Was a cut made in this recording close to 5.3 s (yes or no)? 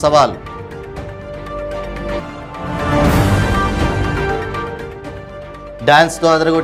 no